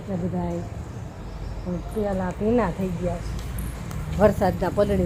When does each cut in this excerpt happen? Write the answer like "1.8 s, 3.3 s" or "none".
none